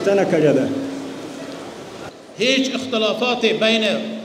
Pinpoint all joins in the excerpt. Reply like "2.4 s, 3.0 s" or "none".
2.1 s